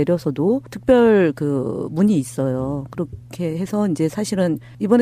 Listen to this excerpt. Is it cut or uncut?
cut